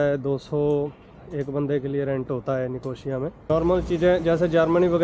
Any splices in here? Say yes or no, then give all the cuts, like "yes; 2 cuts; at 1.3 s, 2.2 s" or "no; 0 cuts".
yes; 1 cut; at 3.5 s